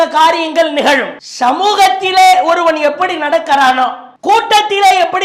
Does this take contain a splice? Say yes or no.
no